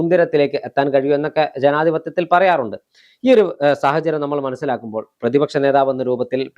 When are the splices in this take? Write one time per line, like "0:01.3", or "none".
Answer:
none